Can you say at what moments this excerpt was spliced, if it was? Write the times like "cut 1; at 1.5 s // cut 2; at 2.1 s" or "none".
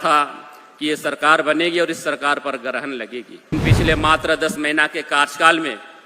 cut 1; at 3.5 s